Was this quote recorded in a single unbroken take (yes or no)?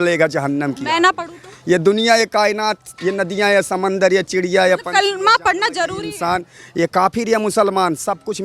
yes